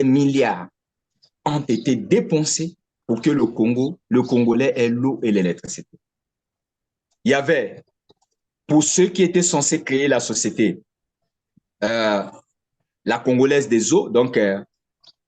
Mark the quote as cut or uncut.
cut